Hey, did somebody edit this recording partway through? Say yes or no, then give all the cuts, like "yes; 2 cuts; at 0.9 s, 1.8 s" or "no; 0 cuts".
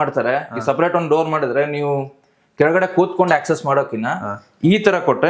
no; 0 cuts